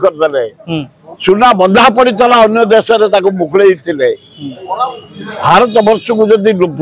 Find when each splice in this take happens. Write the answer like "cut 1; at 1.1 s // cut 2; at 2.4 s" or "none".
none